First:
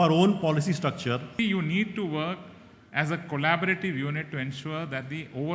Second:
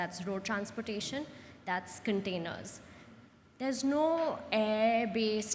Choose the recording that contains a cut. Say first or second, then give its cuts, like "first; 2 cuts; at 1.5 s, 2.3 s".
first; 1 cut; at 1.4 s